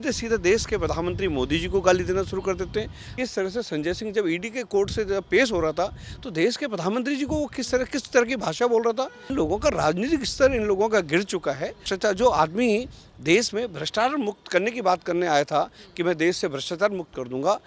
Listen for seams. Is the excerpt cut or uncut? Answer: cut